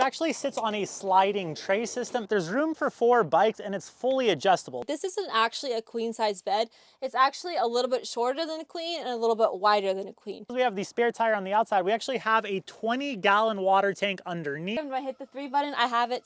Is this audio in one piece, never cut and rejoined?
no; 4 cuts; at 2.3 s, 4.8 s, 10.4 s, 14.8 s

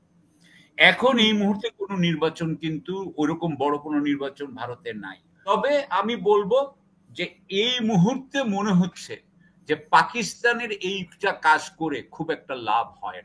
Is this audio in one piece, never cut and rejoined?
no; 1 cut; at 5.5 s

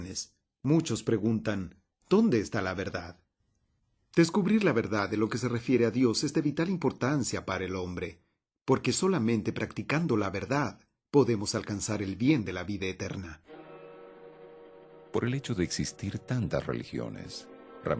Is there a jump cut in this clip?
yes; 1 cut; at 13.4 s

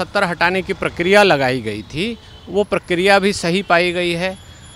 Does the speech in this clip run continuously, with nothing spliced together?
yes; 0 cuts

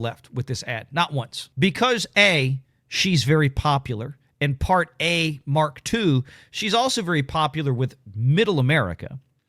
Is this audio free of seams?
no; 1 cut; at 1.4 s

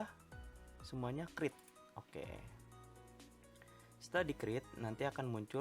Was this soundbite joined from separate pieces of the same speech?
yes; 2 cuts; at 2.5 s, 4.1 s

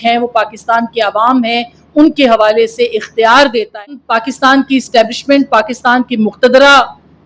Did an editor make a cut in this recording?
yes; 1 cut; at 3.9 s

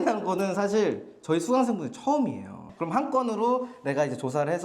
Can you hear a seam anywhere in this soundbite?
yes; 1 cut; at 2.6 s

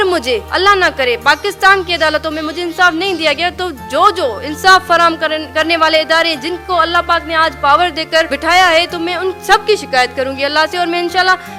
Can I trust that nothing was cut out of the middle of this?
yes; 0 cuts

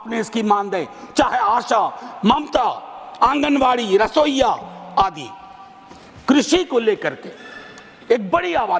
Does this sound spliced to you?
no; 0 cuts

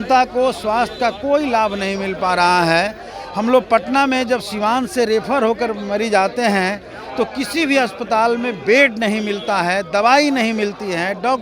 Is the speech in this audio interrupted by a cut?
no; 0 cuts

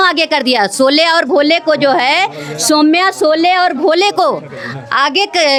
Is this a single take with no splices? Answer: yes; 0 cuts

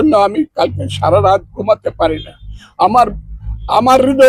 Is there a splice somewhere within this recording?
no; 0 cuts

